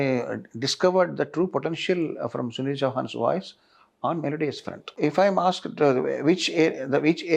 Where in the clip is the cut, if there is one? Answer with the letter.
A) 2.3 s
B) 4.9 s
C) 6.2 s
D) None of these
B